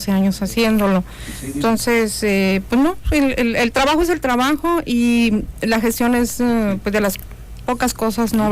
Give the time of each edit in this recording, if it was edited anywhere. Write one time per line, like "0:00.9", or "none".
none